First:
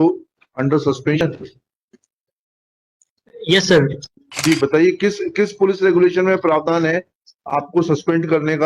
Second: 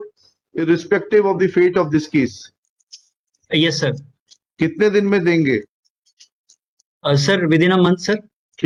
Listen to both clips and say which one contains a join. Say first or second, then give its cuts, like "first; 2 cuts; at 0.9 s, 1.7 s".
first; 2 cuts; at 1.2 s, 4.2 s